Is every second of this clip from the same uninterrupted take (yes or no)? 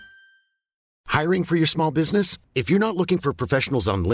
no